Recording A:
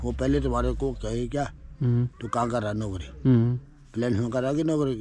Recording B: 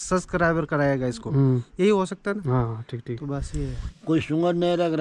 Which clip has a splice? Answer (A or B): B